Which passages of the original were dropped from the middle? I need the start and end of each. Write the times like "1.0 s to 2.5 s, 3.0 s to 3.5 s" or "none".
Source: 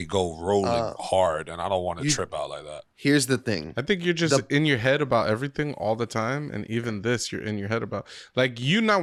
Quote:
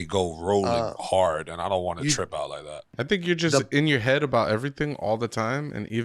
2.9 s to 3.7 s